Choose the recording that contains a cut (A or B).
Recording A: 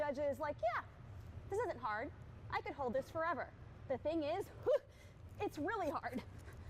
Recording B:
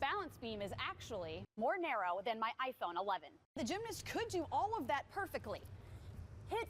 B